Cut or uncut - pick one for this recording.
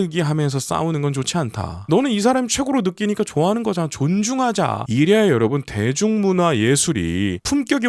cut